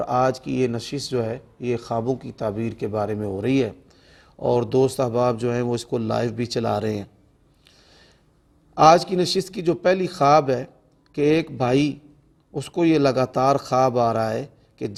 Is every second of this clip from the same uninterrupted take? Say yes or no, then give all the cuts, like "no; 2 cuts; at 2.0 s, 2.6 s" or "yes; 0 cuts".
yes; 0 cuts